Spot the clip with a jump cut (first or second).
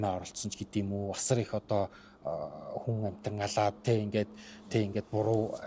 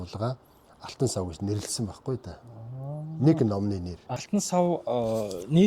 second